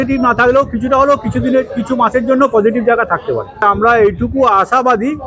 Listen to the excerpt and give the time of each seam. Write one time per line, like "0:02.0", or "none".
0:03.6